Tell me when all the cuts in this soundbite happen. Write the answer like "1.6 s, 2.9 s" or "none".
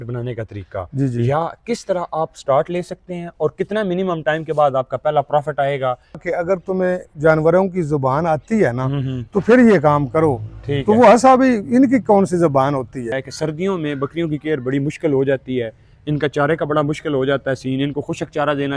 6.2 s, 13.2 s